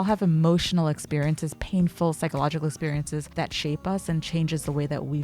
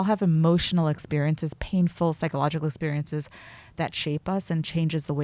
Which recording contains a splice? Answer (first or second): first